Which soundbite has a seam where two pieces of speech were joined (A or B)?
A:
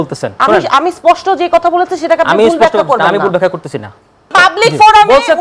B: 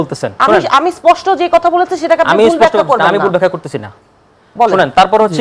A